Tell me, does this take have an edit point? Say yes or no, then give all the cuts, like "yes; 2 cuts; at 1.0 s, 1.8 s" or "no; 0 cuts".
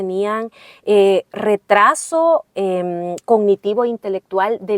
no; 0 cuts